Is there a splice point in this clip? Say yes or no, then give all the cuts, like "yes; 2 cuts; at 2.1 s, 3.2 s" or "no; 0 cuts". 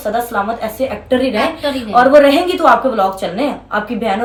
no; 0 cuts